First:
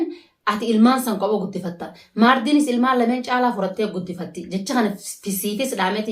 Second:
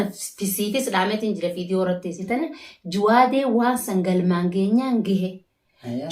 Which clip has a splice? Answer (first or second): second